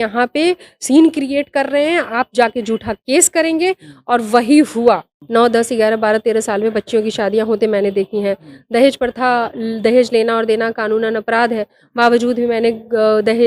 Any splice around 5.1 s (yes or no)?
yes